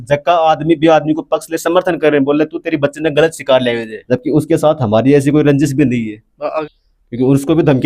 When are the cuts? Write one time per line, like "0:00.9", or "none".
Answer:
0:03.9
0:06.6